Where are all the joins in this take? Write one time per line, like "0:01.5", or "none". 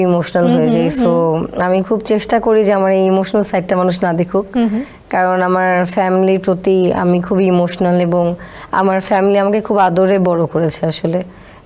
none